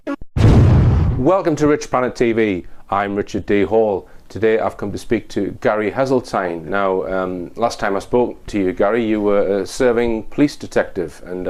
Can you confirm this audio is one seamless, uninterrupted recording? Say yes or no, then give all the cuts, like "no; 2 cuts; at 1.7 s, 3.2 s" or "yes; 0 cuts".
yes; 0 cuts